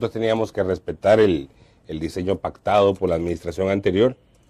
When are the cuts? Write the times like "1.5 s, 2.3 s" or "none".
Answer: none